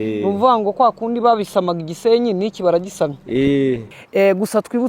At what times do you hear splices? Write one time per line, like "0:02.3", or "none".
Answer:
0:03.9